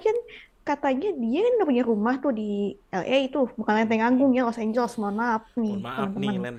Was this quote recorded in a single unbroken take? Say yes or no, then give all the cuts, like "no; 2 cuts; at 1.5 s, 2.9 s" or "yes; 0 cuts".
yes; 0 cuts